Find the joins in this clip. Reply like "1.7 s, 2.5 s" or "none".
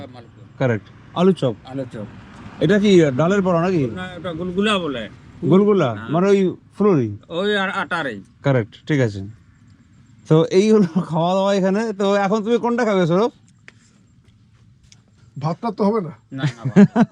none